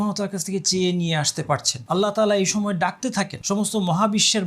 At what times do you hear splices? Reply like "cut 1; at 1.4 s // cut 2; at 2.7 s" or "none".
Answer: cut 1; at 1.7 s // cut 2; at 3.4 s